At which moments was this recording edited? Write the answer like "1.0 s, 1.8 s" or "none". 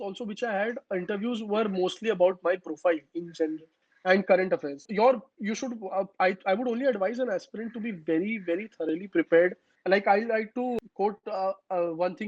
4.9 s, 9.7 s, 10.8 s